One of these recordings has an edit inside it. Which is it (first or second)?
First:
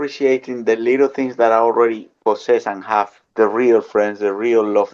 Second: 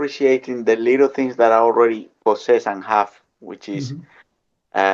first